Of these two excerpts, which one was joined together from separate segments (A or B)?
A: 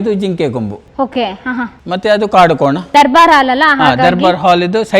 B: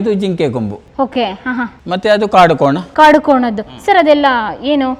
A